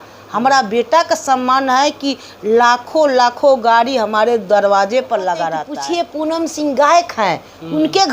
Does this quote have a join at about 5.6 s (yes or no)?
yes